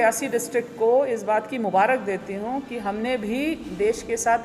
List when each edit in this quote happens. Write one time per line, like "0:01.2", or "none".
none